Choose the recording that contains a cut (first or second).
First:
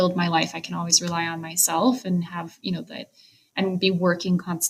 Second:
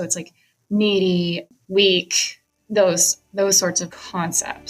second